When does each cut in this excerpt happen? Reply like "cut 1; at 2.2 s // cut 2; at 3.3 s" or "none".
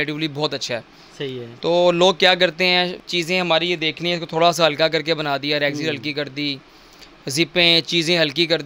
cut 1; at 3.0 s